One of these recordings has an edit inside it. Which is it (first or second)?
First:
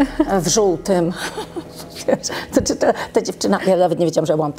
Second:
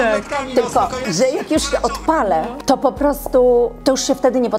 second